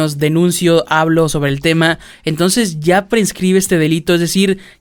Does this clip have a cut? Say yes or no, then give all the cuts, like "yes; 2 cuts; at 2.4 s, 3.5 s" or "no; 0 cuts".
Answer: no; 0 cuts